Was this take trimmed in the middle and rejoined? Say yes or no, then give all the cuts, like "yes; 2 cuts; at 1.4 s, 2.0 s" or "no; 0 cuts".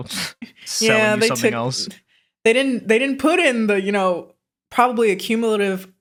no; 0 cuts